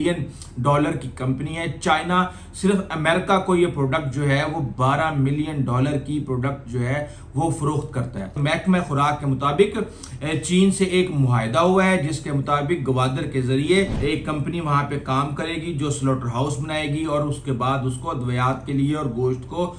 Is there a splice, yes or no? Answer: yes